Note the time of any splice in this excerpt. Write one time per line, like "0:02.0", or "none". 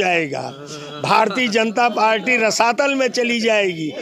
none